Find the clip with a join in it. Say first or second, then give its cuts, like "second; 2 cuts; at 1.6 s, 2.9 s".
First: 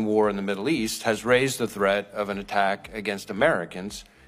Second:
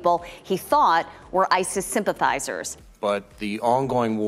second; 1 cut; at 2.8 s